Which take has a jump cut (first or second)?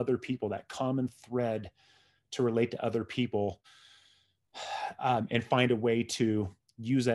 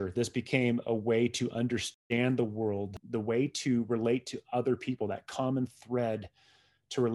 second